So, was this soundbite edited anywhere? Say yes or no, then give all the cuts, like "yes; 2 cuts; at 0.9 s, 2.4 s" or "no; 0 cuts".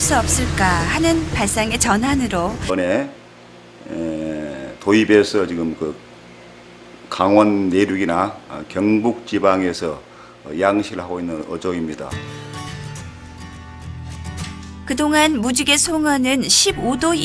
no; 0 cuts